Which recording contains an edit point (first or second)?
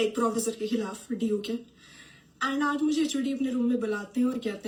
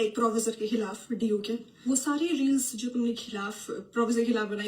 second